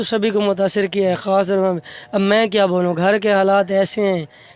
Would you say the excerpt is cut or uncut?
uncut